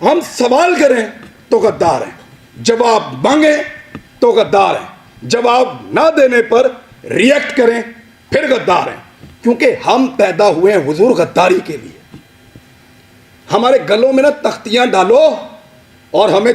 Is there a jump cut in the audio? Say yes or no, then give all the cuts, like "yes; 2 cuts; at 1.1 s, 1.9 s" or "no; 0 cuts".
no; 0 cuts